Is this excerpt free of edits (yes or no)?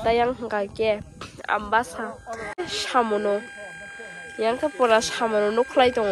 no